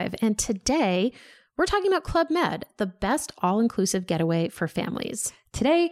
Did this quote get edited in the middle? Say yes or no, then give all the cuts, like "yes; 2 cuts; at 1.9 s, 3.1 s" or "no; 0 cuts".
no; 0 cuts